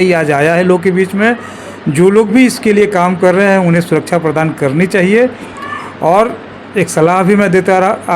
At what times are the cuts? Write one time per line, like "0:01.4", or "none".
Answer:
none

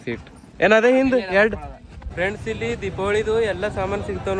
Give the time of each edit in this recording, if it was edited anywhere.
0:02.0

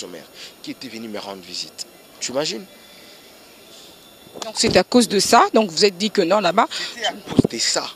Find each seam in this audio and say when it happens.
none

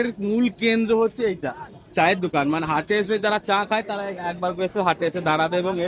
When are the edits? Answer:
none

